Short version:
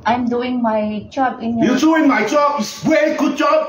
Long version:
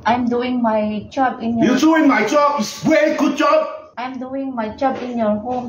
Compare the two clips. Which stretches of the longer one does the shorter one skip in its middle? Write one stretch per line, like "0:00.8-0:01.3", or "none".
none